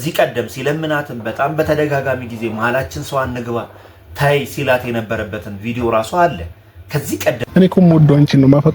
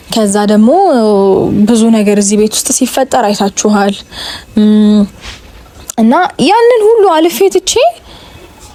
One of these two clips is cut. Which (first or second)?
first